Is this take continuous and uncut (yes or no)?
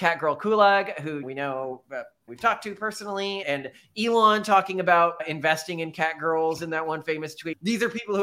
yes